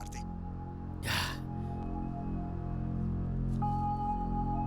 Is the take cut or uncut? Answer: cut